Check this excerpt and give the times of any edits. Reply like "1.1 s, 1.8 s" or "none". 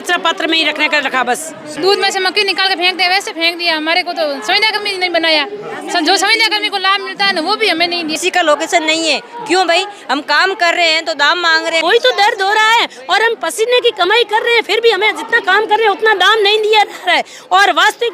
1.7 s, 8.1 s, 11.8 s